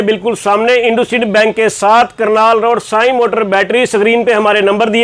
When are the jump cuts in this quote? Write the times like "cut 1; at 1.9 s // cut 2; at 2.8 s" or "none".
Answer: none